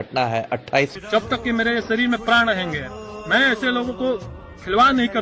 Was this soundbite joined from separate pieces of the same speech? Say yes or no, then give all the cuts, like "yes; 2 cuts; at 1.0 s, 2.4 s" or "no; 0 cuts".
yes; 1 cut; at 0.9 s